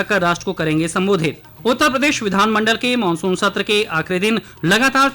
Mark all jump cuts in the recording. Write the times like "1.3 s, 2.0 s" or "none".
1.5 s